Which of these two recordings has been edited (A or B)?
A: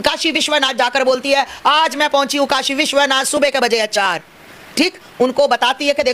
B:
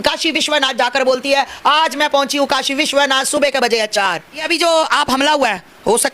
B